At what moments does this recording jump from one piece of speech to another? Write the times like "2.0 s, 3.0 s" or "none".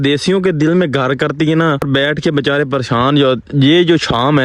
1.8 s